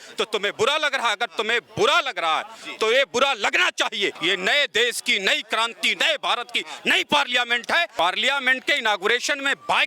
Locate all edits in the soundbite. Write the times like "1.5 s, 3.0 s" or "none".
4.2 s, 7.9 s